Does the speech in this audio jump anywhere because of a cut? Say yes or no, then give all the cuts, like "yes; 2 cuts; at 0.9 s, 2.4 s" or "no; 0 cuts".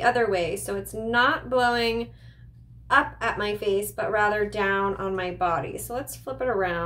no; 0 cuts